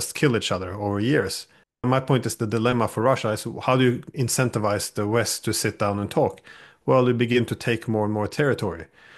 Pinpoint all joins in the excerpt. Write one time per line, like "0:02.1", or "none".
0:01.8